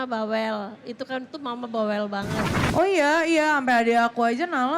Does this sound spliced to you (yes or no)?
yes